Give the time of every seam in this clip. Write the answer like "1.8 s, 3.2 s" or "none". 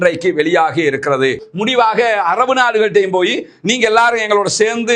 1.5 s